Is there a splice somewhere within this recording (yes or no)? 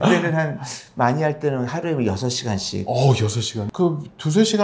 no